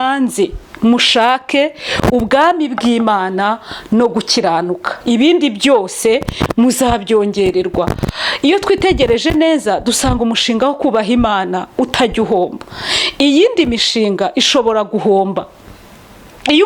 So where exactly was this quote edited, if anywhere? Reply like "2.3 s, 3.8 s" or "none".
none